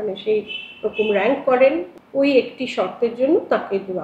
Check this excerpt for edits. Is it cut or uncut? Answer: cut